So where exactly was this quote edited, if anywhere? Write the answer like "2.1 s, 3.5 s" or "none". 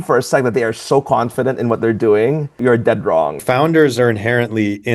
2.5 s, 3.4 s